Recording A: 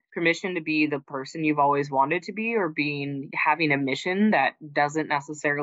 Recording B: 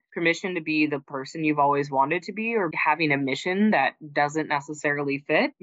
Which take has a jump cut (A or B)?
B